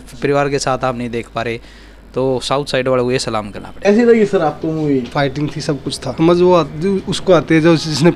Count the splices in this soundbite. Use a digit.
2